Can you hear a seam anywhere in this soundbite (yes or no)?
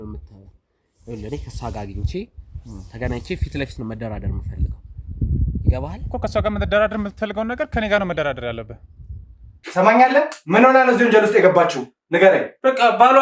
yes